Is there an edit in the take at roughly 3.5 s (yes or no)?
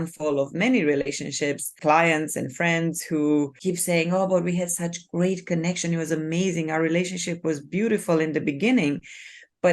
yes